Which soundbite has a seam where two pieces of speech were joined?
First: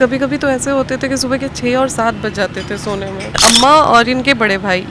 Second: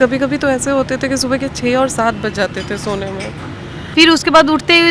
first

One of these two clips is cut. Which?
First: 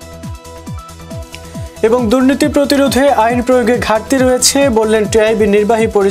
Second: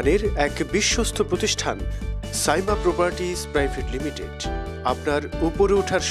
first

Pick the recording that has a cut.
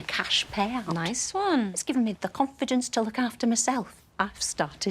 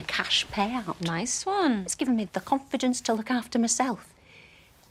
first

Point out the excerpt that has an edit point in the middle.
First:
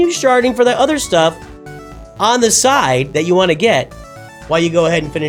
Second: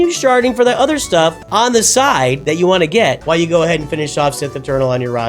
second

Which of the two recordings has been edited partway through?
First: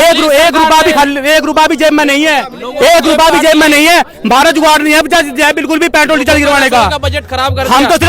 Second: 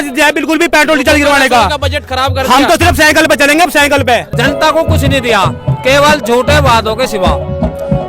second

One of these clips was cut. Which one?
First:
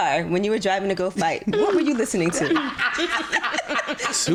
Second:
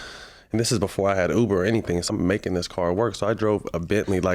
second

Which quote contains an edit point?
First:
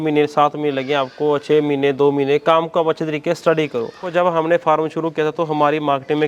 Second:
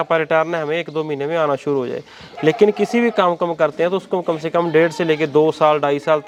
first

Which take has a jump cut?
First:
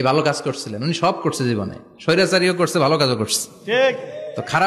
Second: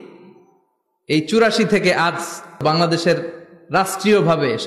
second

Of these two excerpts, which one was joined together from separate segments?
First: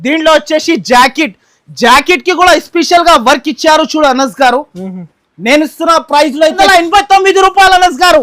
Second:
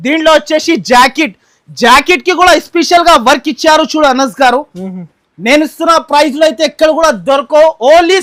first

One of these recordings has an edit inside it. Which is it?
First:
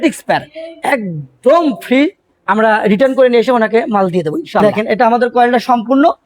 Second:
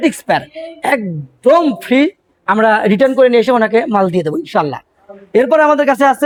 first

